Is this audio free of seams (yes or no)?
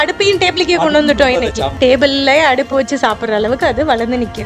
no